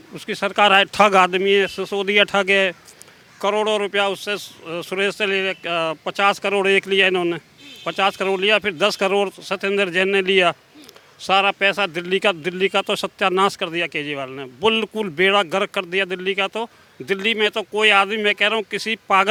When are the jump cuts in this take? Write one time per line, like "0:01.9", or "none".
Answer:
none